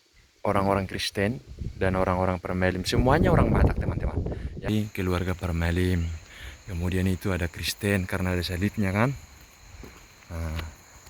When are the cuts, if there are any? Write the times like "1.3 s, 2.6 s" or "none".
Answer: 4.7 s